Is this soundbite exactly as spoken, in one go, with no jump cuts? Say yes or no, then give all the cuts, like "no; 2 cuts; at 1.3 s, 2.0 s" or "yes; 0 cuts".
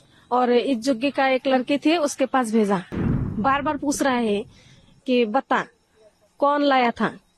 no; 1 cut; at 3.0 s